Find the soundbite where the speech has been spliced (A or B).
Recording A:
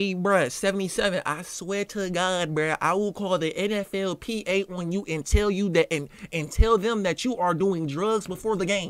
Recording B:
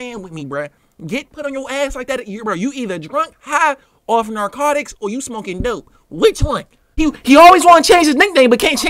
B